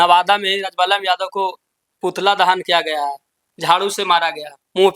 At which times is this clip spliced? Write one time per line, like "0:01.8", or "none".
none